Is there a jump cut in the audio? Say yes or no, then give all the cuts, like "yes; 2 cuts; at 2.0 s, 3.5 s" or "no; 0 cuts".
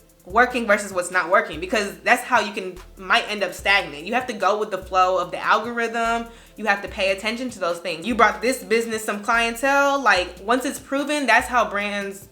yes; 1 cut; at 8.0 s